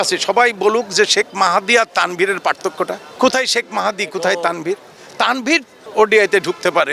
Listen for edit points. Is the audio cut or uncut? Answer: cut